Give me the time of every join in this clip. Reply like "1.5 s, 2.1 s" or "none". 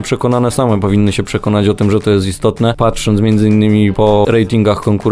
2.8 s, 3.9 s